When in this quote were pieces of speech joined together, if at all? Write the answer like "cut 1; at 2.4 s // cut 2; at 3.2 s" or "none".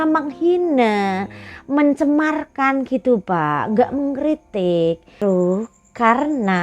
cut 1; at 5.1 s